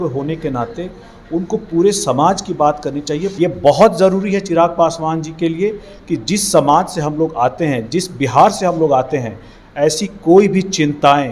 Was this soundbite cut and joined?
yes; 1 cut; at 3.3 s

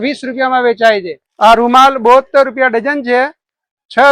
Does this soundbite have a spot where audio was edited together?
yes; 1 cut; at 1.2 s

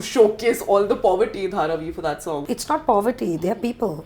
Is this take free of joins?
no; 1 cut; at 2.5 s

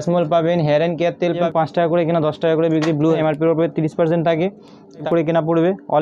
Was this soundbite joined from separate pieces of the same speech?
yes; 3 cuts; at 1.4 s, 3.2 s, 5.0 s

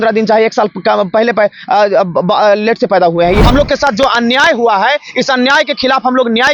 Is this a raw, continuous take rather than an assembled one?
no; 1 cut; at 3.4 s

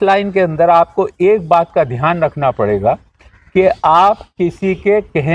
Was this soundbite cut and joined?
no; 0 cuts

